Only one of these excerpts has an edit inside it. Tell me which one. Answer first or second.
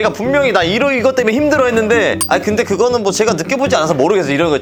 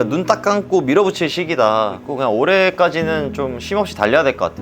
second